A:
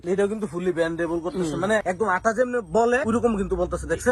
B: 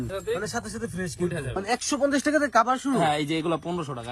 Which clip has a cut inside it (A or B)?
B